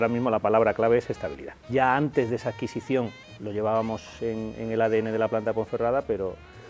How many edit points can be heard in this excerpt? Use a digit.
1